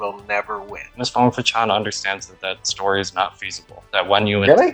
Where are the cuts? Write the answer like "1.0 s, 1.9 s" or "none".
0.9 s